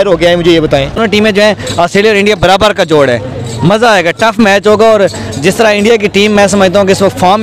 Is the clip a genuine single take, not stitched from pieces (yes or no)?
yes